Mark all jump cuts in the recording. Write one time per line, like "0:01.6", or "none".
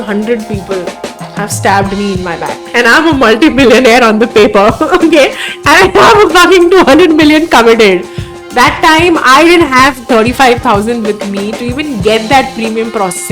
0:02.5